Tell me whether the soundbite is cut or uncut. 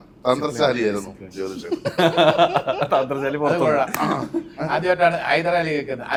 uncut